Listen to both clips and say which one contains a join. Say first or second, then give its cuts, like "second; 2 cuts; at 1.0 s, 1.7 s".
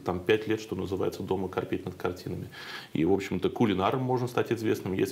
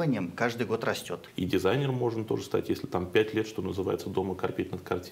second; 1 cut; at 1.2 s